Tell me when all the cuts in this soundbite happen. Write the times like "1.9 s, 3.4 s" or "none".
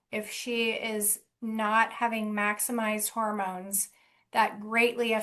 none